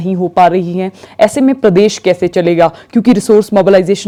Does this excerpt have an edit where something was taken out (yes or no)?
no